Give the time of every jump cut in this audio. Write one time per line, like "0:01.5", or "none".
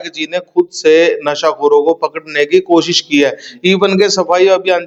none